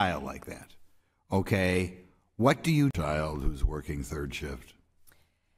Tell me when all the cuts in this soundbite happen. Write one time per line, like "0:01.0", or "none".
none